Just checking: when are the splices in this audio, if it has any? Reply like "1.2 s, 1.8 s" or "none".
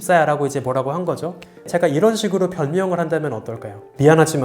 1.7 s